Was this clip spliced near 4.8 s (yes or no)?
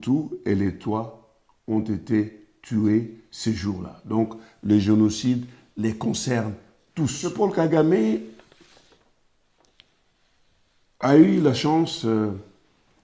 no